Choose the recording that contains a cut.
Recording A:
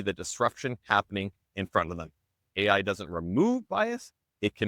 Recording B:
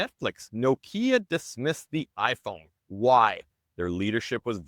A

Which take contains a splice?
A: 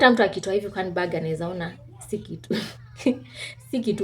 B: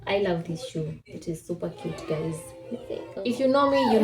B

